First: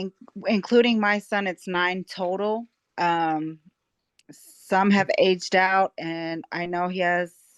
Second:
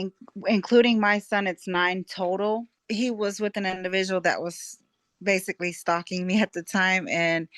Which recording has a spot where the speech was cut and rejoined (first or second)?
second